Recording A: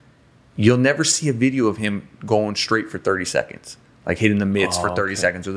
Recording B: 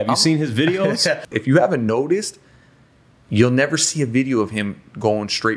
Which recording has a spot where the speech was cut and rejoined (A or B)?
B